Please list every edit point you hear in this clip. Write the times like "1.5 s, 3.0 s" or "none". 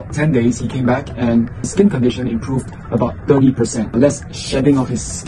1.7 s, 3.9 s

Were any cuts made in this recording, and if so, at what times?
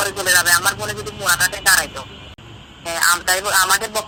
none

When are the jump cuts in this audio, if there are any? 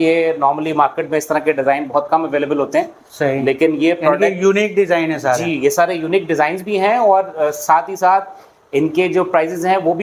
none

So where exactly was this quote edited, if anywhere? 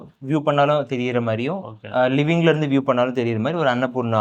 none

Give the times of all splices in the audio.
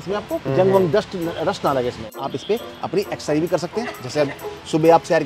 2.2 s

